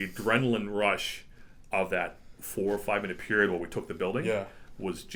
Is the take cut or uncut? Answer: uncut